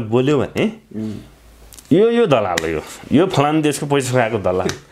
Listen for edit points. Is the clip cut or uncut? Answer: uncut